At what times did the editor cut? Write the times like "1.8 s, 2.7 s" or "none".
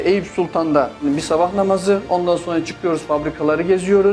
1.0 s

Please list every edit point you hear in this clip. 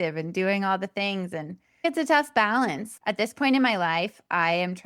1.8 s

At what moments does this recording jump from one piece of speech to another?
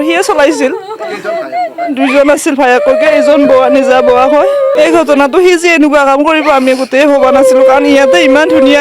4.7 s

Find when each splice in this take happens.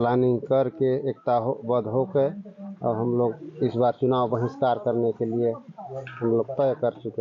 none

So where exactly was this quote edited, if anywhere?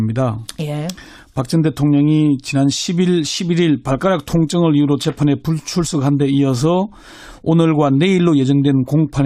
none

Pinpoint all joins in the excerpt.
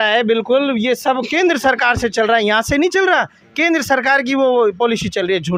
none

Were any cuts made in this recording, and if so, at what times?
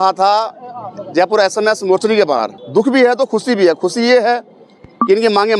2.6 s

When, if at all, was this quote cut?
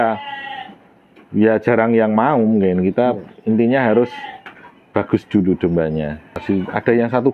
6.4 s

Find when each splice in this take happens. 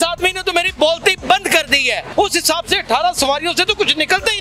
2.1 s

